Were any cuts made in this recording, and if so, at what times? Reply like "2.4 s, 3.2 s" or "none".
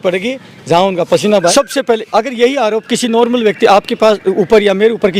1.5 s